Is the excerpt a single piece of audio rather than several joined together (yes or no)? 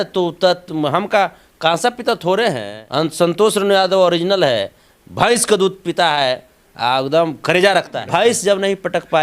no